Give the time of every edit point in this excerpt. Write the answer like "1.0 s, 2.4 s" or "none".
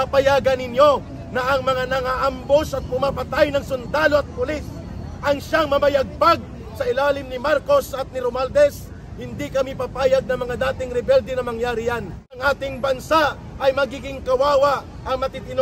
12.4 s